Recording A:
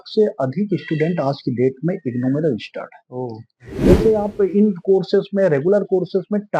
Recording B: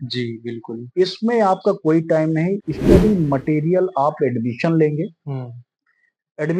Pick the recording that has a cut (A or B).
A